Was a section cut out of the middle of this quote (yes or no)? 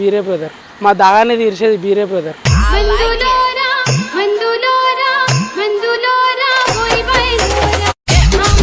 no